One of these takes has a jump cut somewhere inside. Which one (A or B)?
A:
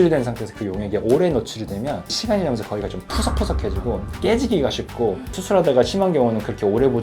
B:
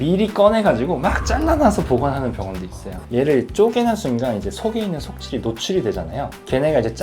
B